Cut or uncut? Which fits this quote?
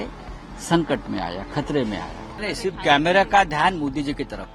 cut